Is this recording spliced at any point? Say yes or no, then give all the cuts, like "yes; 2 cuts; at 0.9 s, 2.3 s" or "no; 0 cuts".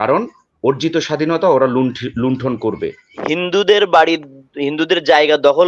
yes; 1 cut; at 3.3 s